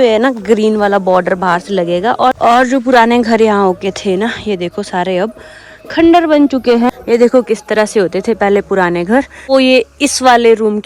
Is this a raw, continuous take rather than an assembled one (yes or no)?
no